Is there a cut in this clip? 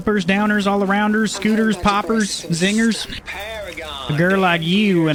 no; 0 cuts

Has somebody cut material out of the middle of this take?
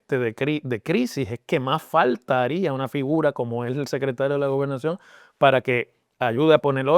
no; 0 cuts

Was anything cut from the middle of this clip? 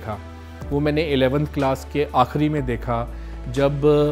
no; 0 cuts

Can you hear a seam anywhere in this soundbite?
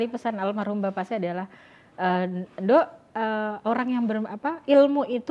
no; 0 cuts

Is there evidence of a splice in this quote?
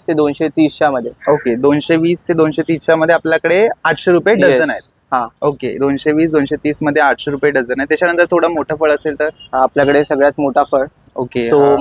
no; 0 cuts

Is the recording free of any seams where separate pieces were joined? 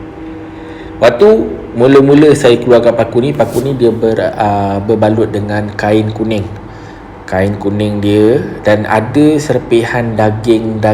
yes; 0 cuts

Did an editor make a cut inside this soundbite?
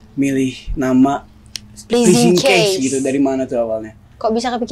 no; 0 cuts

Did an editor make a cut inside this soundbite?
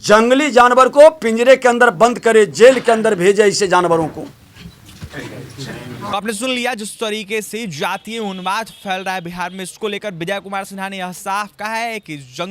no; 0 cuts

